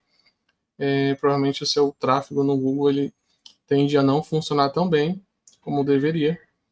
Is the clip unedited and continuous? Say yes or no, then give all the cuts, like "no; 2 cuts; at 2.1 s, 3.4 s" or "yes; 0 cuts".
no; 1 cut; at 2.0 s